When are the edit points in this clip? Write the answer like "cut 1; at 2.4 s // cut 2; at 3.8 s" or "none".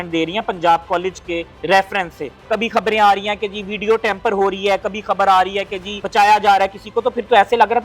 cut 1; at 2.4 s // cut 2; at 6.0 s